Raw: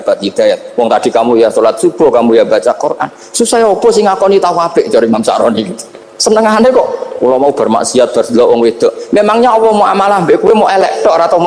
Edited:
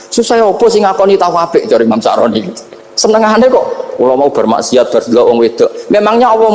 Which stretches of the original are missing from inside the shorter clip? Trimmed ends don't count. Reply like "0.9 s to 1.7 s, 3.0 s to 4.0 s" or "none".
none